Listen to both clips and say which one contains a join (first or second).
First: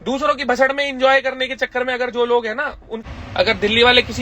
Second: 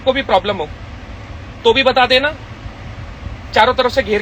first